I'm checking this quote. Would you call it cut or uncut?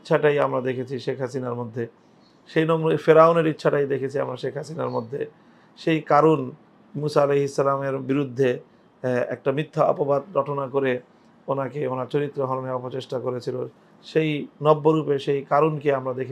uncut